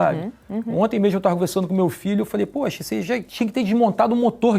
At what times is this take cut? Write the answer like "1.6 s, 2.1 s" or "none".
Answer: 3.3 s